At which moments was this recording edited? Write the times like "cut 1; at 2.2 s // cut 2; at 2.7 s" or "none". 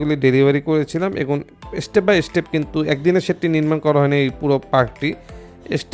none